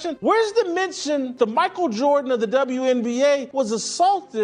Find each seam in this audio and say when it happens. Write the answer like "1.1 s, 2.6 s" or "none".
none